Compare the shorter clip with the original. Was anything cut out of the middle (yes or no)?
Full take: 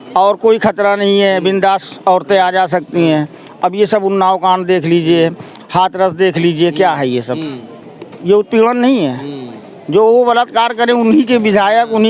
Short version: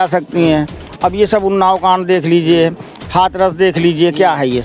no